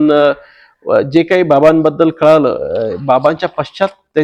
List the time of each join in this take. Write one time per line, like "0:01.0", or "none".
none